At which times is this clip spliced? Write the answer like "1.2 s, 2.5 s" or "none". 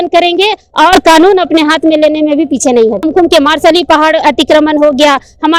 3.0 s